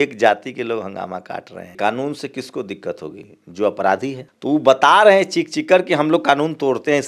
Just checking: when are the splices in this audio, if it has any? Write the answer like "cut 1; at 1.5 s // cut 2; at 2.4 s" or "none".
cut 1; at 1.7 s